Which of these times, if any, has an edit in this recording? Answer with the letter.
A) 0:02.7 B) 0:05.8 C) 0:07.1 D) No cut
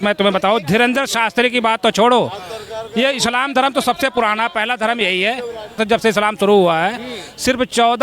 B